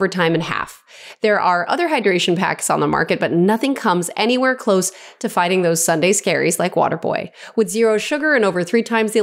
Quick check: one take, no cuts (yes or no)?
yes